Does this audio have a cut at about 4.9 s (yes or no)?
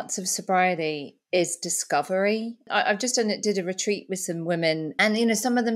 yes